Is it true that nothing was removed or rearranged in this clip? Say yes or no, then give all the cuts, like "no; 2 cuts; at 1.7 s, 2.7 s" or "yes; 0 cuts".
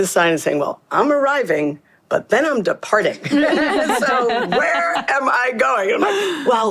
yes; 0 cuts